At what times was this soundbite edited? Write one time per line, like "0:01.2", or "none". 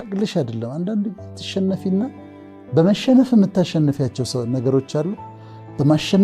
none